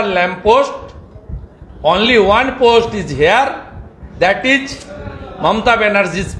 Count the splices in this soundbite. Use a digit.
0